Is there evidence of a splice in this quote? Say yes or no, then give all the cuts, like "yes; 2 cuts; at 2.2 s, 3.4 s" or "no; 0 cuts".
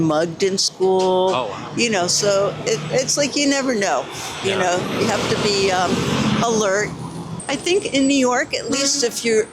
no; 0 cuts